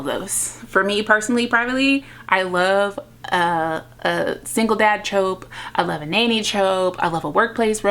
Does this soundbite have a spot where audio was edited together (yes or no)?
no